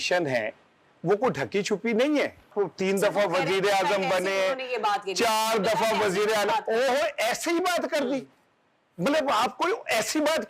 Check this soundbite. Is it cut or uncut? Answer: cut